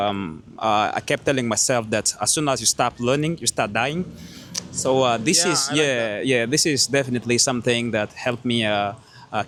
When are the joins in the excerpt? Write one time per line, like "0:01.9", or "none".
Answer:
none